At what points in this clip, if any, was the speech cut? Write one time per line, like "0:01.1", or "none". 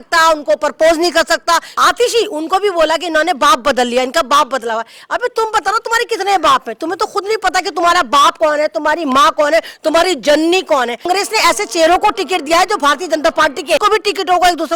0:01.7
0:11.1
0:13.8